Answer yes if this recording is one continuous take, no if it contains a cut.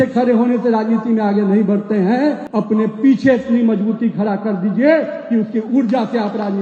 no